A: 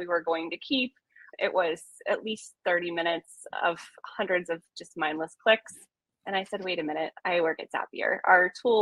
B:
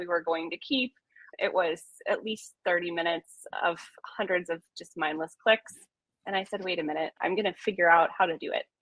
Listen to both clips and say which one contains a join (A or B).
B